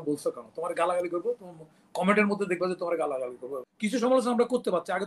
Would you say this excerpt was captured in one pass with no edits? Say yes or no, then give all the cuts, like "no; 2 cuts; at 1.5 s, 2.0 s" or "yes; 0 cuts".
no; 1 cut; at 3.7 s